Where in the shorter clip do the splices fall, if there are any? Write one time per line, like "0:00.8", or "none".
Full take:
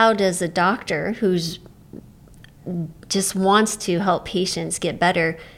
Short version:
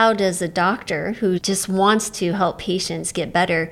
0:01.4